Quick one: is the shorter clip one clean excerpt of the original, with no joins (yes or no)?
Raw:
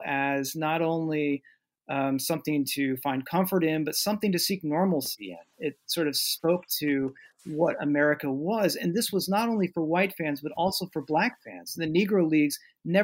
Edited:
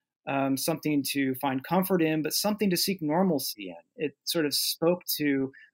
yes